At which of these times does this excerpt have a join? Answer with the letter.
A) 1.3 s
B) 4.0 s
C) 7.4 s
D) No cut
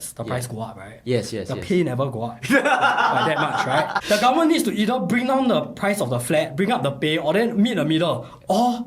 B